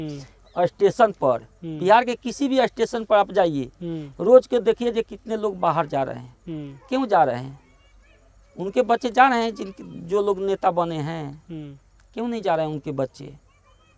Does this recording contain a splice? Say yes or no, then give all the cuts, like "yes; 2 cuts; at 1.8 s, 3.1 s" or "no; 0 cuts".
no; 0 cuts